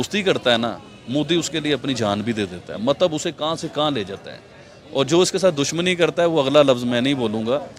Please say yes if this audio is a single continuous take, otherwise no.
yes